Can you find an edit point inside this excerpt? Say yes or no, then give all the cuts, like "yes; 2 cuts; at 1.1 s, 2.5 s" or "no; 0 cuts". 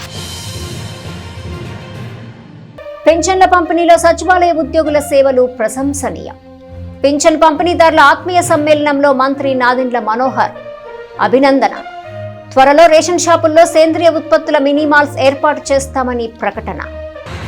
no; 0 cuts